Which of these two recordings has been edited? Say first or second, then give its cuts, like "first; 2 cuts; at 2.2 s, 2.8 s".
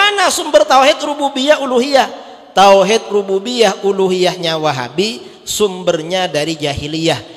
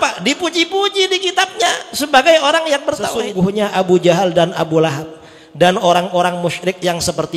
second; 1 cut; at 3.3 s